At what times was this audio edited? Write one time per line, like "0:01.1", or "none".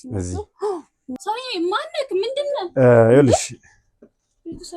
0:01.1